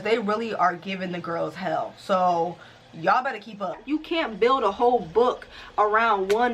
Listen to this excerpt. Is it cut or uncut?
cut